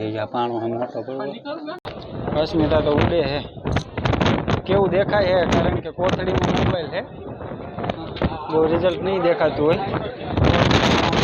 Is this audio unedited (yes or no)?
no